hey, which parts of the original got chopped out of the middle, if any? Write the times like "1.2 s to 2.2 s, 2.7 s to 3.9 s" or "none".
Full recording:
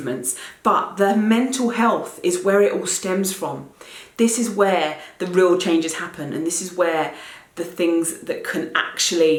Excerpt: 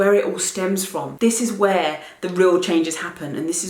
3.5 s to 4.0 s